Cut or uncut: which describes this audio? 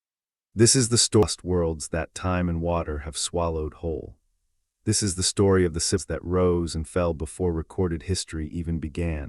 cut